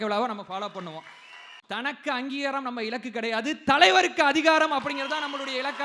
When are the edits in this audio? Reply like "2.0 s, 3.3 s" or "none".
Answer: 1.5 s